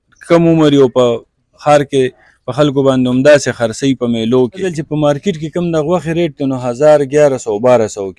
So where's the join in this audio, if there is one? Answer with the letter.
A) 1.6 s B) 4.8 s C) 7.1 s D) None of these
B